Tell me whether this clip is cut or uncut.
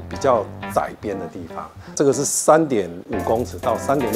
cut